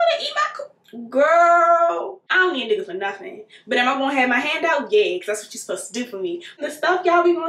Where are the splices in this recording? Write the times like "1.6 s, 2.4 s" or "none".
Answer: 2.2 s, 6.6 s

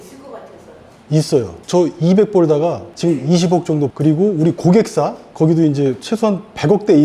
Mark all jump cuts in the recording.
1.6 s

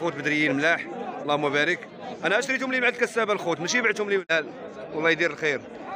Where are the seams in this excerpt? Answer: 4.3 s

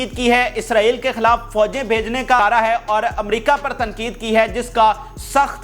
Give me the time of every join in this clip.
2.4 s

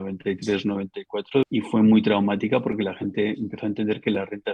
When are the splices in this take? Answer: 1.5 s

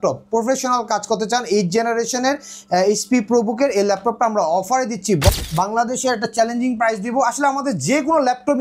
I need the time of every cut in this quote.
5.4 s

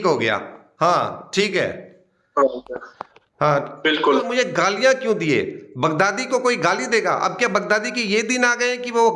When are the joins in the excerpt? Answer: 4.3 s

